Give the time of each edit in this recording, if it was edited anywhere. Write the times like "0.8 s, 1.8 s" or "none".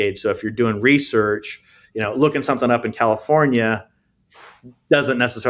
none